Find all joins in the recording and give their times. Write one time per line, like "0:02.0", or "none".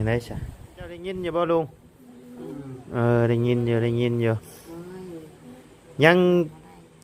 0:01.0